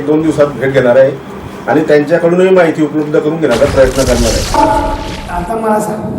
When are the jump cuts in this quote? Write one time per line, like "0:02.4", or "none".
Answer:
0:04.6